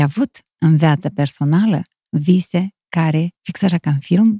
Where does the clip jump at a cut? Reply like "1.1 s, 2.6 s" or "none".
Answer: 3.4 s